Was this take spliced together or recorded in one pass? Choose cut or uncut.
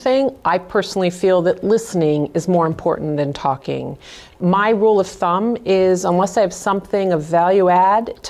uncut